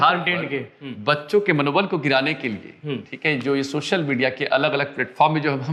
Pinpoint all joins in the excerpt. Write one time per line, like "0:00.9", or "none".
none